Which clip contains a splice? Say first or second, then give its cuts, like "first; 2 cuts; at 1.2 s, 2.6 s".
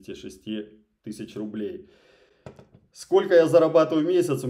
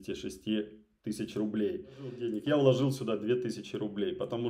second; 1 cut; at 2.3 s